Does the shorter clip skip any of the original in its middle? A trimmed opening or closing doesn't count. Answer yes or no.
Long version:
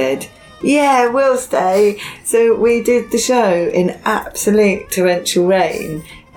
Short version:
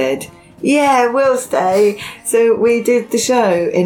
no